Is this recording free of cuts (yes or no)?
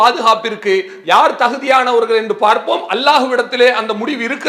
yes